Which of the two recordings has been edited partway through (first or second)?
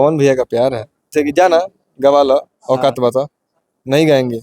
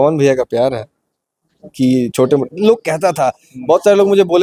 first